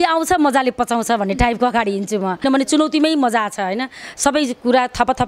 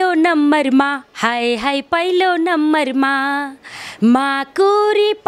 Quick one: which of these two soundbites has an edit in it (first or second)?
first